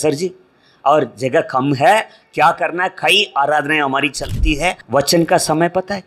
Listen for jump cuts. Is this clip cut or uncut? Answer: cut